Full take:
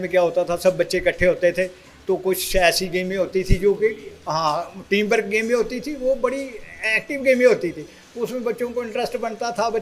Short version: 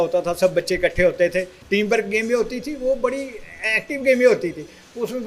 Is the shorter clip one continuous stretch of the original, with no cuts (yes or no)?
no